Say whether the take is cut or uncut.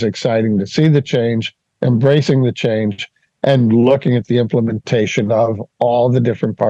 uncut